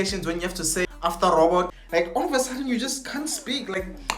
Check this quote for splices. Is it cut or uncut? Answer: cut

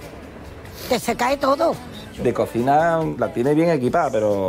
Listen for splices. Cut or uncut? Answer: cut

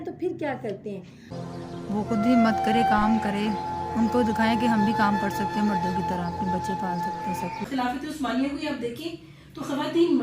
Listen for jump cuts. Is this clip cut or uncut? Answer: cut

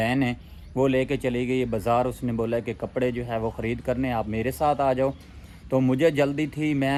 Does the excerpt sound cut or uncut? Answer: uncut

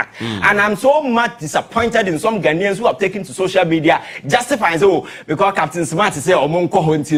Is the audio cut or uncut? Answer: uncut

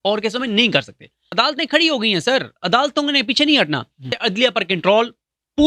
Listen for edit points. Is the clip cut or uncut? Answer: cut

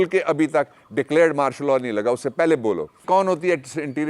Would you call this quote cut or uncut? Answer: cut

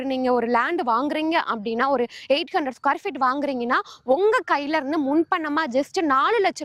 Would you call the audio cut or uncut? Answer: uncut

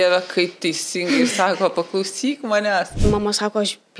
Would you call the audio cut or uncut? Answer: cut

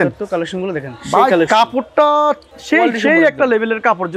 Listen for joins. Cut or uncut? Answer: uncut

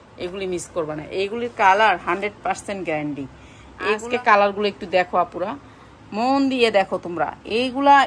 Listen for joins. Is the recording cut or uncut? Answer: cut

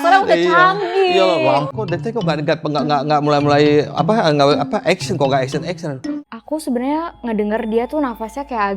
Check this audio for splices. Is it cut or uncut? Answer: cut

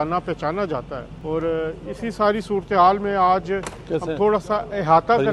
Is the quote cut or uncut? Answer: uncut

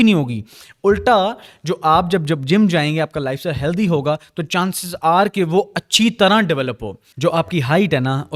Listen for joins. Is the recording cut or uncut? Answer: uncut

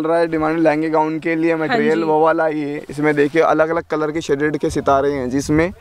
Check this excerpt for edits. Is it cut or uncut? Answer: uncut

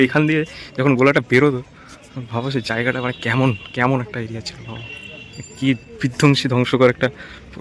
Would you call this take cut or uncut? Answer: uncut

